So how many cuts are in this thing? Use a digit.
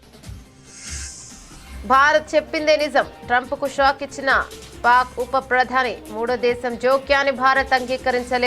1